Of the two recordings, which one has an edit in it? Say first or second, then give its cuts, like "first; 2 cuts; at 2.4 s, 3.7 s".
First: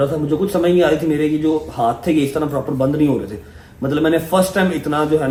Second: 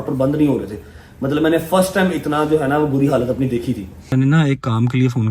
second; 1 cut; at 4.1 s